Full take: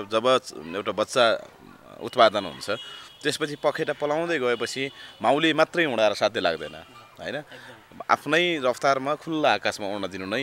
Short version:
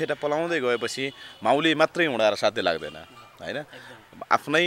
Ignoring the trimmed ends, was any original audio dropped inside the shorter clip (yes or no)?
no